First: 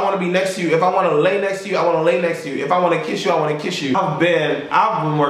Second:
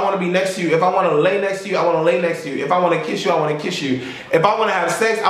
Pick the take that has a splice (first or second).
first